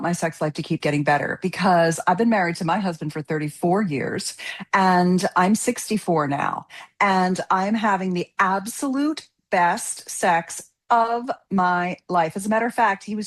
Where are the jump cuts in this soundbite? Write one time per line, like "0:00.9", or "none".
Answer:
none

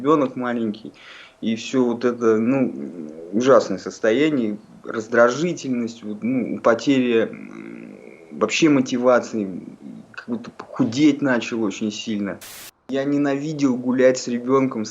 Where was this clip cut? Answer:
0:12.9

